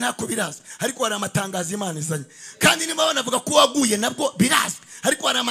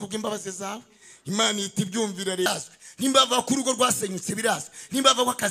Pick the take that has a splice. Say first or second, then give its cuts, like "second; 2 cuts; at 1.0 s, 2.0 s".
second; 1 cut; at 2.5 s